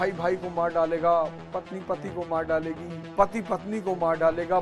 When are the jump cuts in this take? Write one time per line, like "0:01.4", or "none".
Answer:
0:02.9